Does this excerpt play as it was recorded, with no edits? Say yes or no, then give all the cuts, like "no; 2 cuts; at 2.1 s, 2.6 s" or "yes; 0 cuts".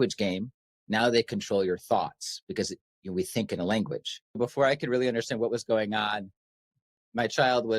no; 1 cut; at 4.4 s